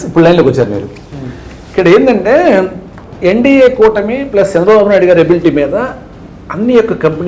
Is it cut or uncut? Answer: uncut